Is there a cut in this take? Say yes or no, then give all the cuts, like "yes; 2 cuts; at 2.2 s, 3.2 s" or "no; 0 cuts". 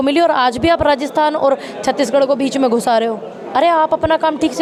no; 0 cuts